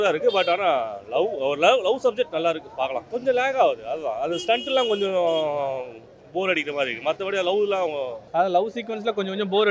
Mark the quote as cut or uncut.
cut